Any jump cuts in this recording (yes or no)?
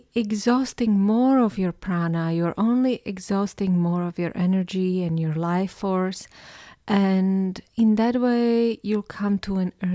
no